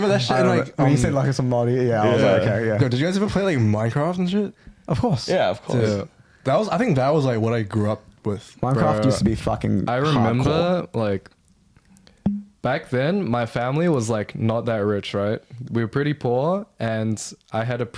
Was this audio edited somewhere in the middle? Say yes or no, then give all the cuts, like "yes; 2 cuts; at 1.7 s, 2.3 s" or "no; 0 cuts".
no; 0 cuts